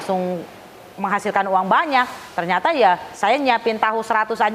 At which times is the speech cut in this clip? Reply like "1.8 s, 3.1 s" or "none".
none